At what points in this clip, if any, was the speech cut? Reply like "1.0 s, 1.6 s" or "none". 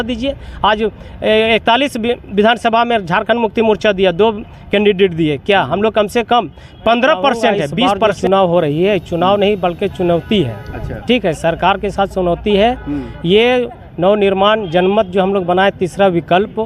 8.0 s